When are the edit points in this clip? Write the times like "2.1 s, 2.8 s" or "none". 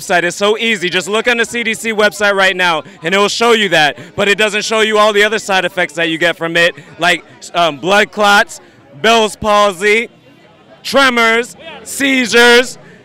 none

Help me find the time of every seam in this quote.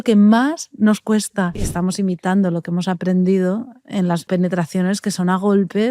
1.6 s, 4.3 s

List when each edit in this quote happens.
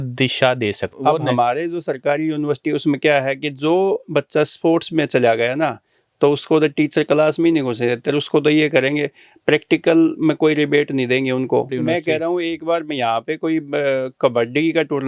0.9 s, 11.7 s

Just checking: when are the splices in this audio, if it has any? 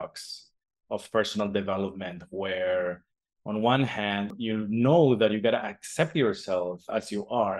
4.3 s

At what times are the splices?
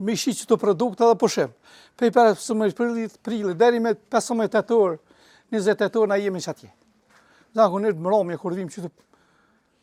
none

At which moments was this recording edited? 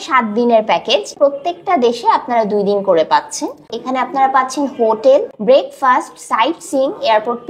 1.1 s, 3.6 s, 5.3 s

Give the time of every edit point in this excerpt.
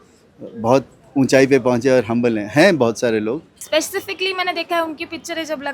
3.5 s

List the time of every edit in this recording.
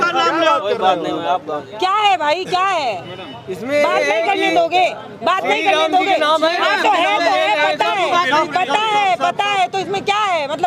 none

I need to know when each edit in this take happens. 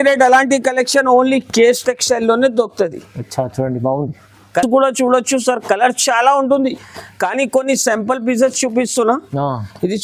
none

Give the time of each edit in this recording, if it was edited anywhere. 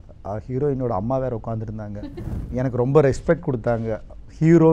2.0 s

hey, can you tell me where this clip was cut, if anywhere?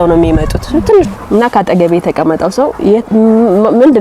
1.1 s

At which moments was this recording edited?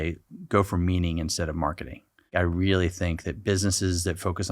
2.3 s

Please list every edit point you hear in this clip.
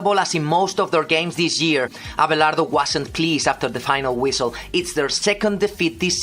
2.0 s

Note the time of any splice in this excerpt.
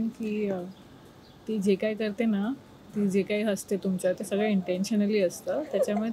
none

